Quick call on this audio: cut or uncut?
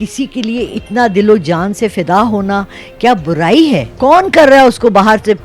cut